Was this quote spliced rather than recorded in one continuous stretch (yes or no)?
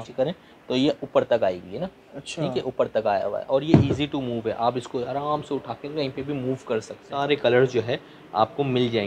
yes